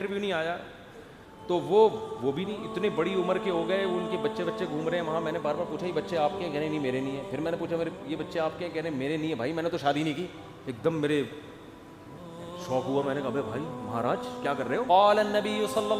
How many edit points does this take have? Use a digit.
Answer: 1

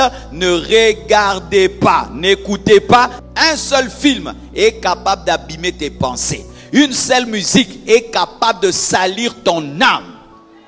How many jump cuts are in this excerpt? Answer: 1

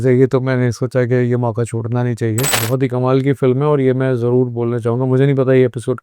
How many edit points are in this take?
1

